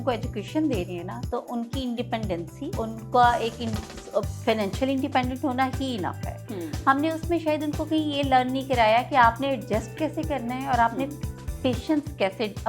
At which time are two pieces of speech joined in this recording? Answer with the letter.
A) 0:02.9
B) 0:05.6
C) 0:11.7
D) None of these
A